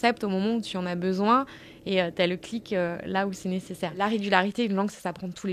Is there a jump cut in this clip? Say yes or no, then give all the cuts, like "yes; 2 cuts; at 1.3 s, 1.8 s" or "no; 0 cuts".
yes; 1 cut; at 4.0 s